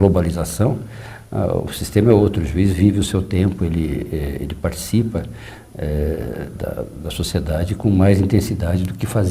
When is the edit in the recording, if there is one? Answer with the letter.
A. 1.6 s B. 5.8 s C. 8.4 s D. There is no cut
C